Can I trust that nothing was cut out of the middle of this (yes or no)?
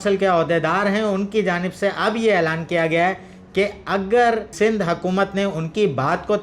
yes